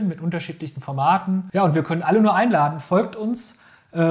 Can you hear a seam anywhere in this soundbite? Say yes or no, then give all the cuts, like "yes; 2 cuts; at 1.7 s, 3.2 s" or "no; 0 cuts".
yes; 1 cut; at 1.5 s